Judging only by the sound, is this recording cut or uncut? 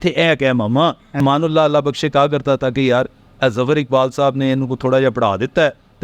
cut